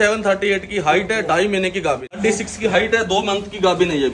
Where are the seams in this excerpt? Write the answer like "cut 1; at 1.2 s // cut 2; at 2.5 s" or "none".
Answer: cut 1; at 2.2 s